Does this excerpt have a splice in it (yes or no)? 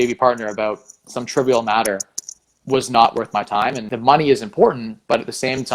yes